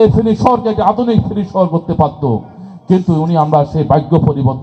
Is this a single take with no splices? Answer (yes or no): yes